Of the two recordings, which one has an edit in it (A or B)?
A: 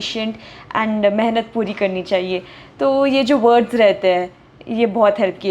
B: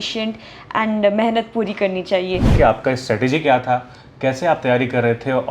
B